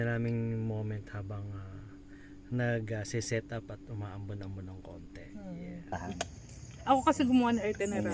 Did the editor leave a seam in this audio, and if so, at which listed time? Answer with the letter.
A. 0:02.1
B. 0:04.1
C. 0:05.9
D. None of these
C